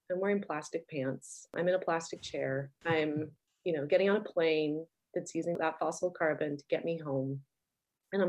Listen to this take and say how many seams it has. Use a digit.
2